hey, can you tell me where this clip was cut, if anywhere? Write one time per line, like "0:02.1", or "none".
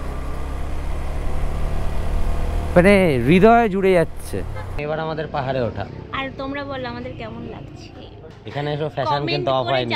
0:04.7
0:08.2